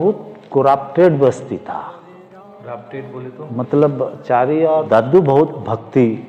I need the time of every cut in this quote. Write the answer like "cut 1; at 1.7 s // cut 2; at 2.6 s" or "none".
cut 1; at 4.9 s